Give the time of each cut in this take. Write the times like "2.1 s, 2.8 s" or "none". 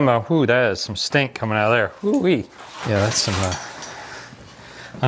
2.5 s